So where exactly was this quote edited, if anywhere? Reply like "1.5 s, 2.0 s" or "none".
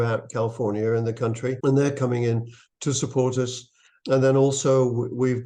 none